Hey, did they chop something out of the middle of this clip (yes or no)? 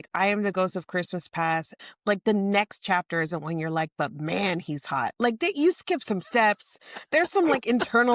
yes